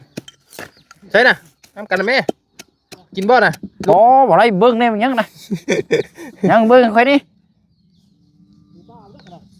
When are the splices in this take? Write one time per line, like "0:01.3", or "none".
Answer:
0:03.7